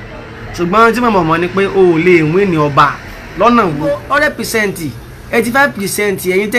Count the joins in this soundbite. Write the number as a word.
one